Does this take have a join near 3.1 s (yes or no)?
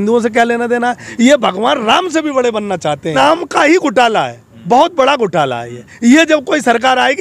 yes